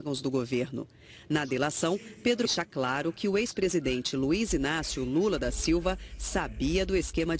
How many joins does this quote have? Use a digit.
0